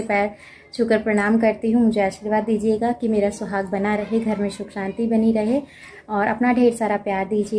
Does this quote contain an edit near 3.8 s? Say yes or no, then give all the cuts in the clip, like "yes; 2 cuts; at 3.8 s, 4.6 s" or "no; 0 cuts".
no; 0 cuts